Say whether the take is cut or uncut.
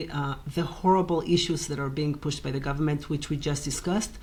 uncut